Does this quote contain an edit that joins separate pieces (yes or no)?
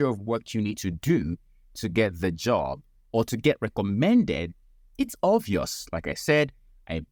no